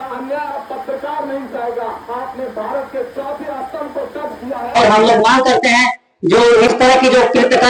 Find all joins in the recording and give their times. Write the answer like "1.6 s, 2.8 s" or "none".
4.7 s